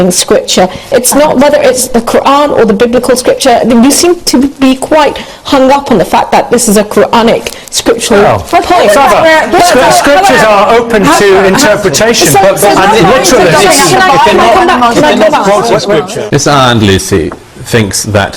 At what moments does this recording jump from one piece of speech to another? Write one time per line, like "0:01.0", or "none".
0:16.2

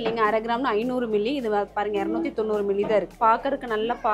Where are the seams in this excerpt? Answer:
0:03.2

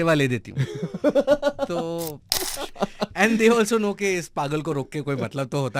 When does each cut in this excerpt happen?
0:02.4

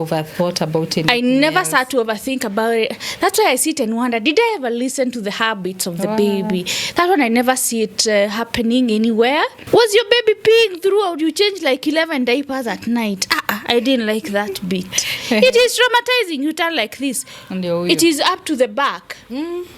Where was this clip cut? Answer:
0:09.6

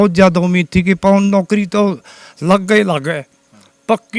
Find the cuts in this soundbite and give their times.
none

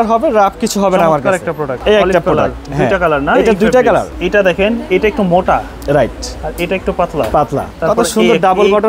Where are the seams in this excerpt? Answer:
0:01.7
0:04.1
0:07.7

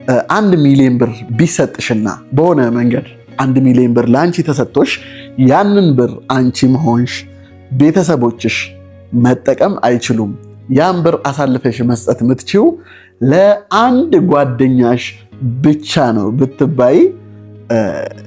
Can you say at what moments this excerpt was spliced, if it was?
none

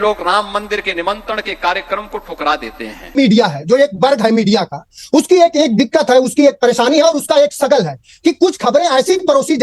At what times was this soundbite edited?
0:03.1

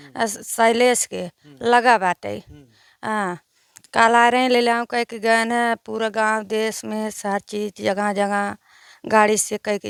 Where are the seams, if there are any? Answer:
none

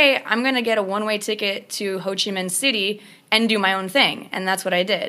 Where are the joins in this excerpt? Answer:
none

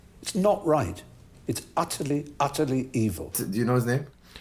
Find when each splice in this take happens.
0:03.4

